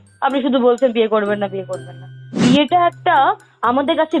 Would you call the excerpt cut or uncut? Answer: cut